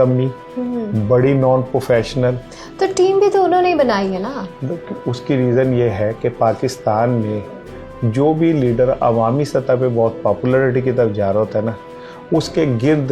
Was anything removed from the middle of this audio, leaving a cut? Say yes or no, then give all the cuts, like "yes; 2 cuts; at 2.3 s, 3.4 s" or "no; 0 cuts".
no; 0 cuts